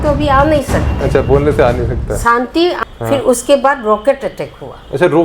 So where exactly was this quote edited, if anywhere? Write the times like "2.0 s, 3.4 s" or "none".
2.8 s